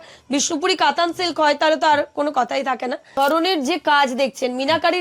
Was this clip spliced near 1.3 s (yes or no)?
no